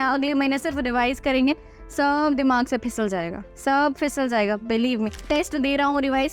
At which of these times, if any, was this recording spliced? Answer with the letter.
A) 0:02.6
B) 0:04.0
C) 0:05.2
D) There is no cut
C